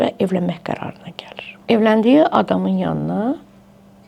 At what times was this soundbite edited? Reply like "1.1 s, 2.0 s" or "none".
none